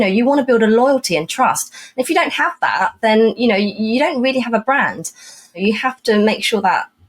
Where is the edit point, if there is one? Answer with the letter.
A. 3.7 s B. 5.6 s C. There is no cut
B